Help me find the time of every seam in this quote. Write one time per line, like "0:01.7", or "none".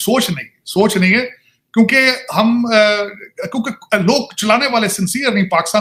none

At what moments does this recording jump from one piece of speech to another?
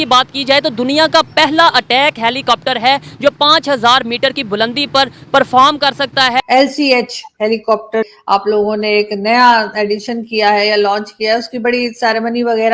0:06.4
0:08.1

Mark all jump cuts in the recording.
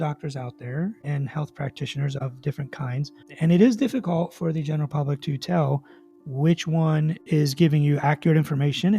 0:01.0
0:02.2

